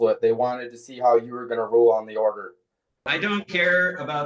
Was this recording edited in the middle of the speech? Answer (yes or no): yes